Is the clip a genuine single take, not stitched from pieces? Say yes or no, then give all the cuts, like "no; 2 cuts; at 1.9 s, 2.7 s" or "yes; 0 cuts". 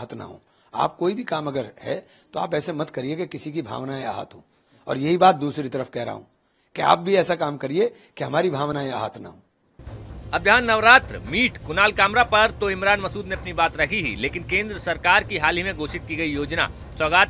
yes; 0 cuts